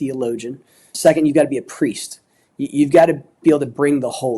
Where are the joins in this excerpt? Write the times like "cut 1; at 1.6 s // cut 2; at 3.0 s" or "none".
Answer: cut 1; at 0.9 s